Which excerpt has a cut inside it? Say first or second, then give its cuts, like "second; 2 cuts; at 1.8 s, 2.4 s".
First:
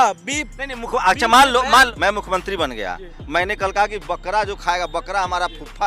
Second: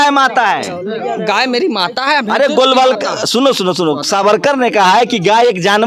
first; 1 cut; at 1.9 s